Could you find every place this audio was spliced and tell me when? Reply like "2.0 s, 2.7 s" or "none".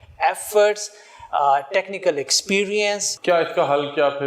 3.1 s